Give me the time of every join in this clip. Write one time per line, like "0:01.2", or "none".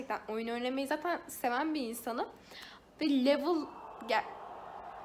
none